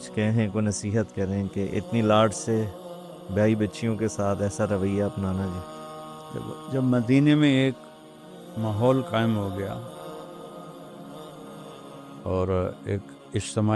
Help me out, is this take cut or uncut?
cut